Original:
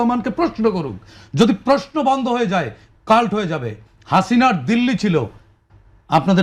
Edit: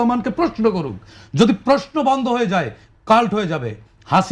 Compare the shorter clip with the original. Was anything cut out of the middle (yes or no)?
no